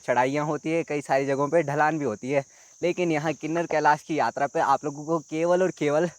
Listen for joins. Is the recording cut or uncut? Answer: uncut